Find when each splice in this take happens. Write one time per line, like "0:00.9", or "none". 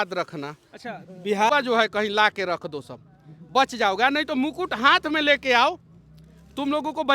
0:01.5